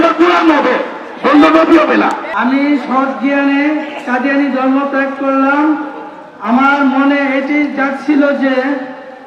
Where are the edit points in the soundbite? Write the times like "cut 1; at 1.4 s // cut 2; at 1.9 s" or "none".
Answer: cut 1; at 2.2 s